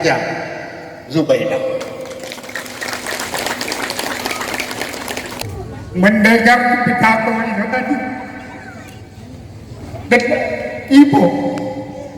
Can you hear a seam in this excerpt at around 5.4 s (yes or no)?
yes